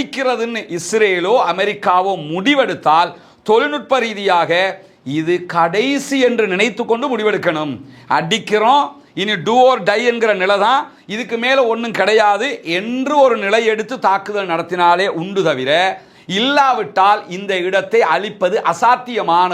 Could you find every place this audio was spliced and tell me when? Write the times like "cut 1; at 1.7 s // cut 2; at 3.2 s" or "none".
none